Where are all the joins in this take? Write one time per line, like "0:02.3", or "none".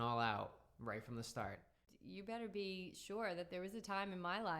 0:01.9